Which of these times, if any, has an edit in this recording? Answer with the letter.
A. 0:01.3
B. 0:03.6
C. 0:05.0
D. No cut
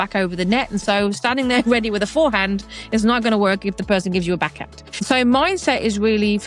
C